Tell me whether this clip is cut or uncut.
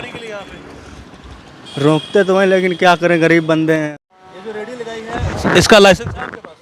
cut